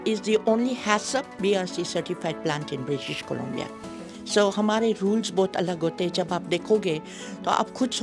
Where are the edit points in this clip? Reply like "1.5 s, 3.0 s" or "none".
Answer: none